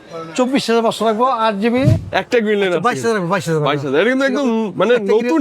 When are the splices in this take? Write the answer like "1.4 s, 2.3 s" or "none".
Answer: 2.1 s